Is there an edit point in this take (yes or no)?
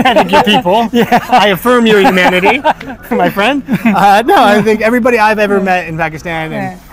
no